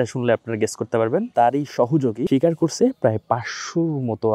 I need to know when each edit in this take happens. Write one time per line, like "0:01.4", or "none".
0:01.3
0:02.2

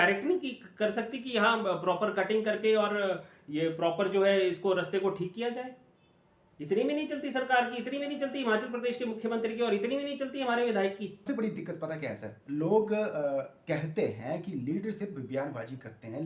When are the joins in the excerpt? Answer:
0:11.2

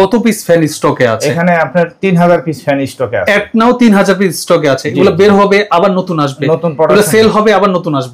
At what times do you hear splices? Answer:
none

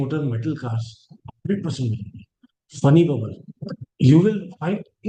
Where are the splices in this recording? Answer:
none

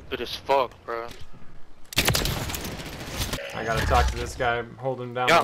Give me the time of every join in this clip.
0:03.4

